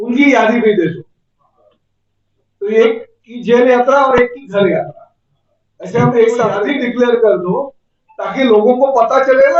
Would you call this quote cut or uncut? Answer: cut